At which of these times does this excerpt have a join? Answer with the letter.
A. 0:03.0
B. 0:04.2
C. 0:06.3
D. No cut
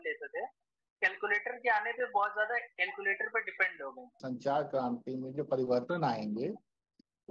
B